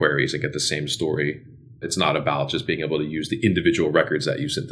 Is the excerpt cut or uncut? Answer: uncut